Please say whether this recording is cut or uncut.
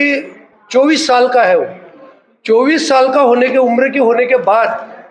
uncut